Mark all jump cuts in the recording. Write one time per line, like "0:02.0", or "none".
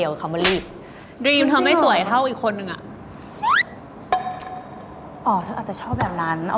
0:01.1